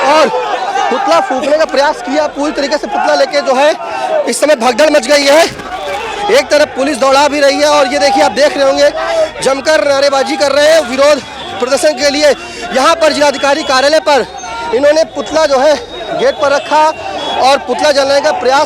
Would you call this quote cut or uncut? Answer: uncut